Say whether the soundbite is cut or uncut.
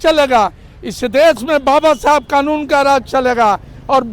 uncut